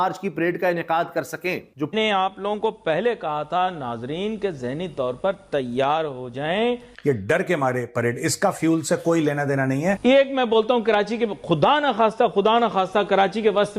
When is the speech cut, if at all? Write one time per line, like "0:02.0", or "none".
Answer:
0:01.9